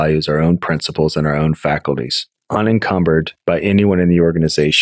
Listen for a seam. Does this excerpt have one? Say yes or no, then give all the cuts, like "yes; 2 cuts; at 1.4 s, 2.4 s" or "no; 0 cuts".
yes; 1 cut; at 3.3 s